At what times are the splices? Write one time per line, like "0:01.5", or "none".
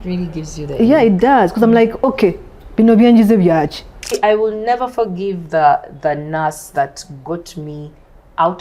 0:04.1